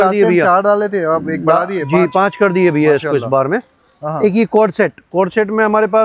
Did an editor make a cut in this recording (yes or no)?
no